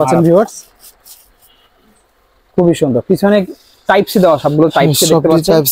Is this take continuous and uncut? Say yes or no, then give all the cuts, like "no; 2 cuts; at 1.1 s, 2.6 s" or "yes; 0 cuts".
yes; 0 cuts